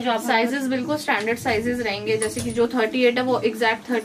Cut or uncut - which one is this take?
uncut